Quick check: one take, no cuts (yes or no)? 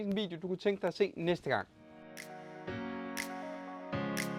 no